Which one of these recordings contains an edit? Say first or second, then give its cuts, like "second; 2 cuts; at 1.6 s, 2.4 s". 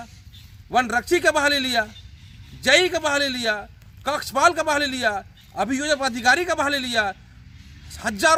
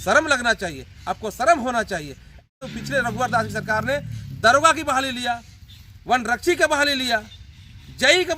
second; 1 cut; at 2.6 s